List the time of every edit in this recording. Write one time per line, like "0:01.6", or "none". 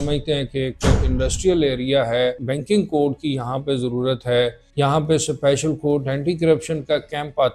0:02.5
0:04.6